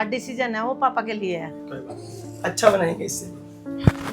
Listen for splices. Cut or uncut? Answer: cut